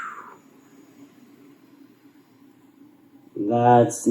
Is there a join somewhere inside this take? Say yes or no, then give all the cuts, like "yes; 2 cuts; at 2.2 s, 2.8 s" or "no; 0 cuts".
no; 0 cuts